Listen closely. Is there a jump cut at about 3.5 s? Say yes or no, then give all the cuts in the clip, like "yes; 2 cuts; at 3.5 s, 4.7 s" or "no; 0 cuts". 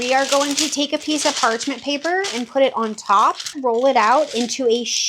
yes; 1 cut; at 3.5 s